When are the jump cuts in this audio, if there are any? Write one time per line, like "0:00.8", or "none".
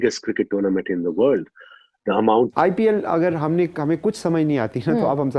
0:02.5